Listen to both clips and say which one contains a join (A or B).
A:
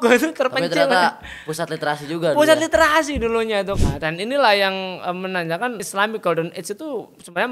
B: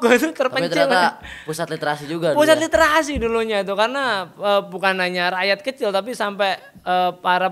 A